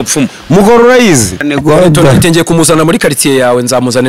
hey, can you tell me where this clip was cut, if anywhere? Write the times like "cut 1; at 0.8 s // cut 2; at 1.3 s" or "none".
cut 1; at 1.4 s